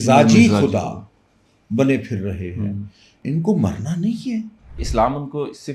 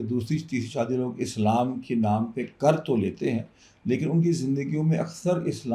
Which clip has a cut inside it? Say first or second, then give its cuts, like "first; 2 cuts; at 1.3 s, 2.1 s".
first; 2 cuts; at 3.2 s, 4.8 s